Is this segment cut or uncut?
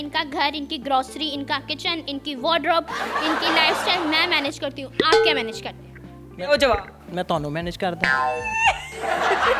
uncut